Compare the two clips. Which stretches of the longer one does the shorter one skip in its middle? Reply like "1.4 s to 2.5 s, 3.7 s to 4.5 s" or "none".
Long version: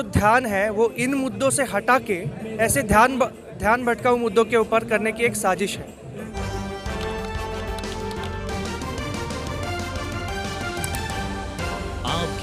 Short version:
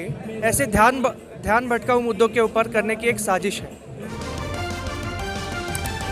6.3 s to 9.2 s